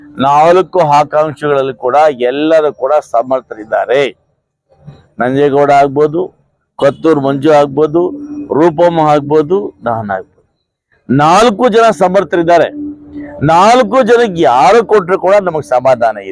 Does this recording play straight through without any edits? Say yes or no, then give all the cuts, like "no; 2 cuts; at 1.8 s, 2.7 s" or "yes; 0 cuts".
yes; 0 cuts